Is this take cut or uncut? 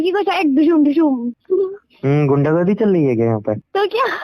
cut